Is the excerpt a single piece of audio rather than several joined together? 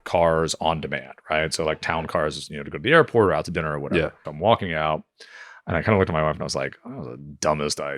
no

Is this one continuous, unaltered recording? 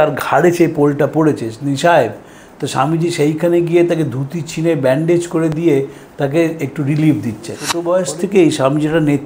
no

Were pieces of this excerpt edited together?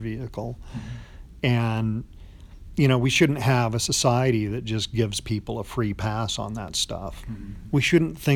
yes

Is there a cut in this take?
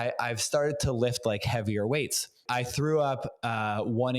yes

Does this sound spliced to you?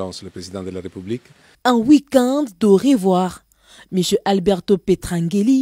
no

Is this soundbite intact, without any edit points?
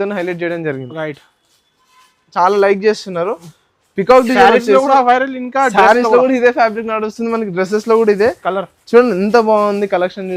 no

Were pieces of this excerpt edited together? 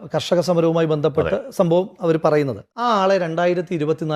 yes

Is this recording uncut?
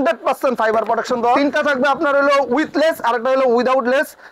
no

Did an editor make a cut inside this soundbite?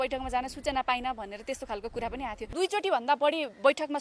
yes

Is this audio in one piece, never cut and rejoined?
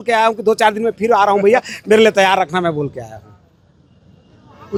yes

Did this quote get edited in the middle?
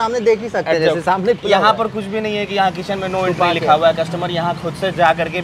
no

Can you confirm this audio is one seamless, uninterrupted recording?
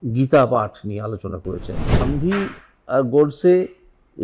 no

